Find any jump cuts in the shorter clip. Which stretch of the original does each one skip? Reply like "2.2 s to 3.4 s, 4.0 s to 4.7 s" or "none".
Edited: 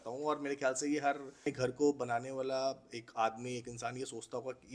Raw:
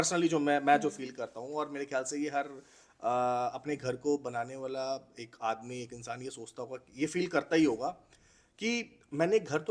2.7 s to 3.7 s